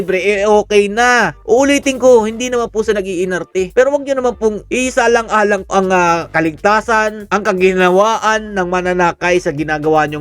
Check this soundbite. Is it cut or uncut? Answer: uncut